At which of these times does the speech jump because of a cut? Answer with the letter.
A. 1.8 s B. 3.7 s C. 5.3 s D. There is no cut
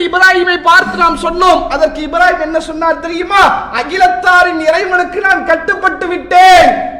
D